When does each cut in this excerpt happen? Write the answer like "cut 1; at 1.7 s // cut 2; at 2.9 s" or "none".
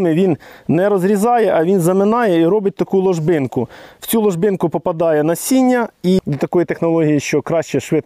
cut 1; at 6.2 s

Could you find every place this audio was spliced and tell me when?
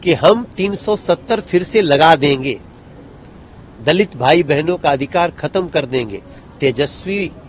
none

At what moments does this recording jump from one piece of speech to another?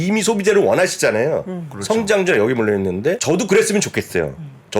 cut 1; at 3.2 s

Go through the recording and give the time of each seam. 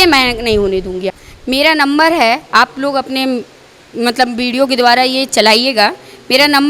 cut 1; at 1.1 s

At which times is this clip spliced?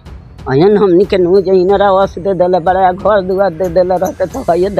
none

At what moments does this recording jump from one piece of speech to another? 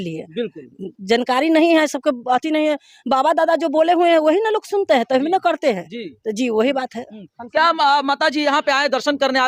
none

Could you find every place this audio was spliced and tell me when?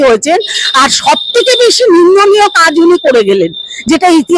none

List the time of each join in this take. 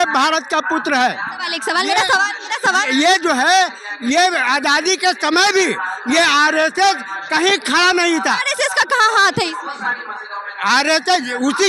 none

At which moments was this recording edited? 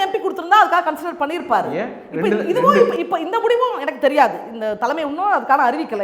none

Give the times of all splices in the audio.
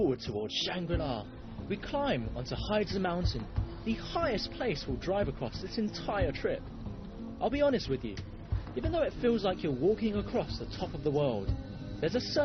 none

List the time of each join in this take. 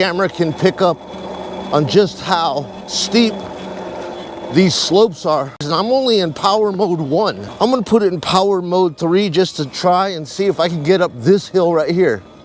cut 1; at 5.7 s // cut 2; at 7.4 s

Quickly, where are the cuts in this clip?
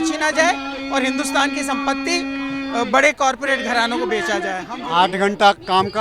cut 1; at 4.7 s

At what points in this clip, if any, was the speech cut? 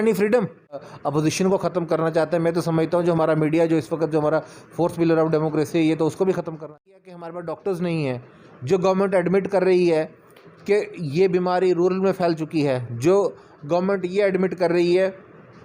cut 1; at 0.9 s // cut 2; at 6.6 s

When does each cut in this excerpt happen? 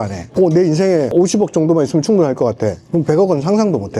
none

